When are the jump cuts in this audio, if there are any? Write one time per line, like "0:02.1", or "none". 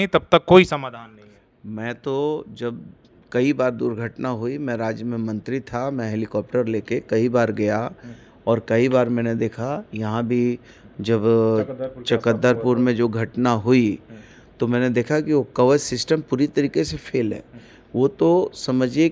none